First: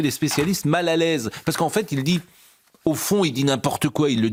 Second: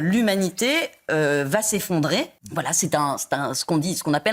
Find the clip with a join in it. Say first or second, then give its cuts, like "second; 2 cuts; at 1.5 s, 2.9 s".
second; 1 cut; at 2.4 s